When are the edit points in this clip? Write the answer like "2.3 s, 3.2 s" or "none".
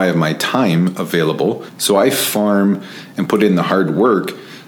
1.7 s